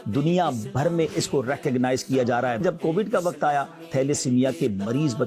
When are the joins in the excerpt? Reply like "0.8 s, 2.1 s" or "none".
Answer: 2.6 s, 3.9 s